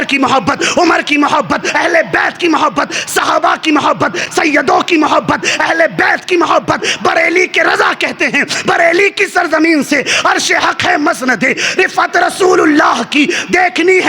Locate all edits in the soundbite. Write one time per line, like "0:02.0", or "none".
0:01.7